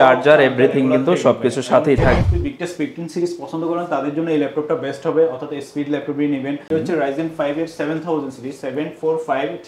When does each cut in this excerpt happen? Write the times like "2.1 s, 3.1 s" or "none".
2.2 s, 6.7 s